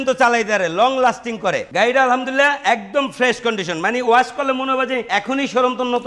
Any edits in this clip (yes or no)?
yes